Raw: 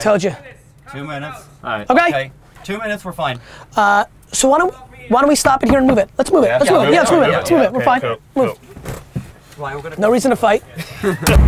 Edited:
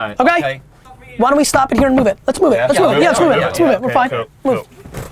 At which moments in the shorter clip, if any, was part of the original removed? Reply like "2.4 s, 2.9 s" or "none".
1.0 s